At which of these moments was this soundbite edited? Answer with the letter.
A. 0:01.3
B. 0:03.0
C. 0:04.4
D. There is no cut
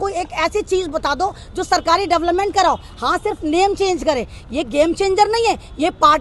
D